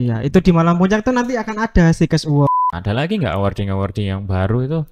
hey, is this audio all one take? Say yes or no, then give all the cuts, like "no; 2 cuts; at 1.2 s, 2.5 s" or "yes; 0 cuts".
no; 1 cut; at 2.5 s